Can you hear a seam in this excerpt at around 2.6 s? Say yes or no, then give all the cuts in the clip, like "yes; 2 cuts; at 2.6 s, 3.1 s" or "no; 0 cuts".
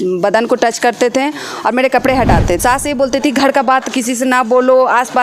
yes; 1 cut; at 2.6 s